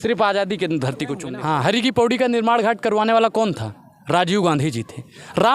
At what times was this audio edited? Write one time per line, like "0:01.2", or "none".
0:01.2